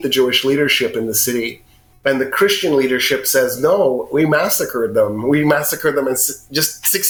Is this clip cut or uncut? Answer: uncut